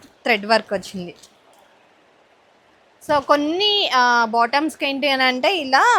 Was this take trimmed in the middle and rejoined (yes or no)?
no